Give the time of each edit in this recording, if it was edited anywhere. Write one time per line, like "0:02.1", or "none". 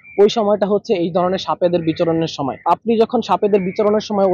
0:02.6